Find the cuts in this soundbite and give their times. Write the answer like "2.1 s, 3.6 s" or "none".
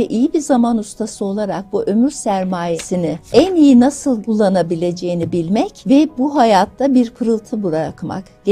2.8 s, 4.2 s, 5.8 s